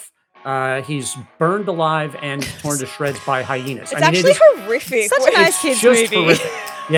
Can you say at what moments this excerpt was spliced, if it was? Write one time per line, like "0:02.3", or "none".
none